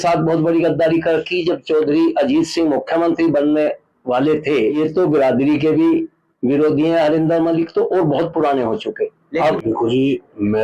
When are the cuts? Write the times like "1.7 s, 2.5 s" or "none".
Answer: 4.8 s, 9.6 s